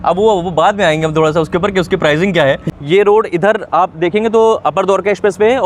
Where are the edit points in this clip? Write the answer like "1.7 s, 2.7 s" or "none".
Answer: 2.7 s